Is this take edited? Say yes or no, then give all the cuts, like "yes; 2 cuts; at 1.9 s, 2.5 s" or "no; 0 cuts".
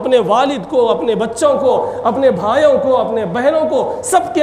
no; 0 cuts